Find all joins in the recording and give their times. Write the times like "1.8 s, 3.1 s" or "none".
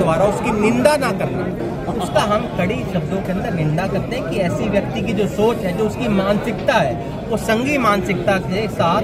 1.6 s